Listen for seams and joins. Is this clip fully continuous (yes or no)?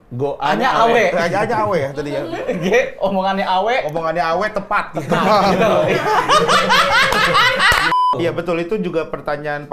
no